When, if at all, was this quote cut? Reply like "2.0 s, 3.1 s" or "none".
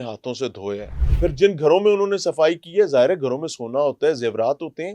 1.0 s

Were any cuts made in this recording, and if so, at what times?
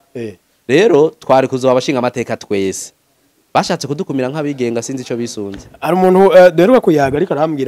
5.6 s

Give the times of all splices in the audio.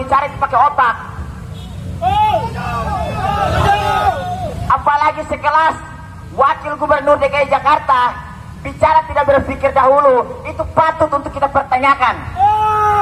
none

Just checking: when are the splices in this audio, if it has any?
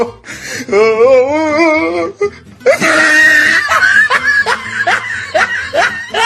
5.0 s

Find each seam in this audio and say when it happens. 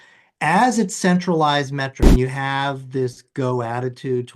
2.0 s

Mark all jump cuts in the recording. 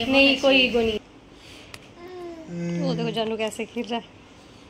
1.0 s

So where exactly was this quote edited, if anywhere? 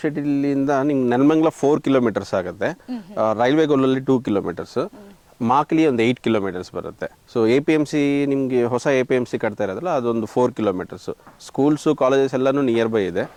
none

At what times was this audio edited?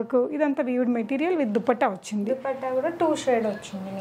none

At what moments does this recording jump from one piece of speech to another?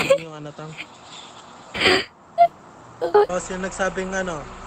3.3 s

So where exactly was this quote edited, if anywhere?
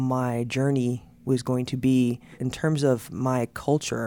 2.4 s

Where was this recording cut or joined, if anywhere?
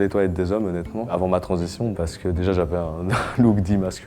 1.1 s, 1.9 s

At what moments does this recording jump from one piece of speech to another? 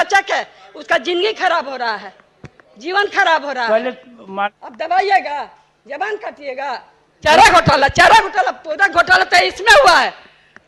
4.6 s, 7.0 s

